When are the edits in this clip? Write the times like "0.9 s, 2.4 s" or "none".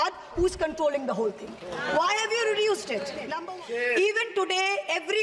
3.4 s